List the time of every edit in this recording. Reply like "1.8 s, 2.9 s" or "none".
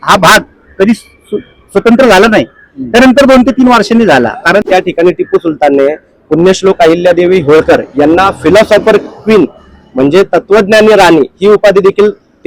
4.7 s